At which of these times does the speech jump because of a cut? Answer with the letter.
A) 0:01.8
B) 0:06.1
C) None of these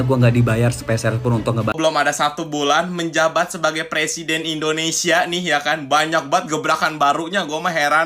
A